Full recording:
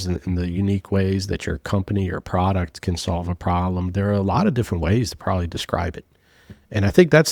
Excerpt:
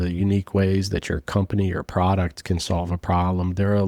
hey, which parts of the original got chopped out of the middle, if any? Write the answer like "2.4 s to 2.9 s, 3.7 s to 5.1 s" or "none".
none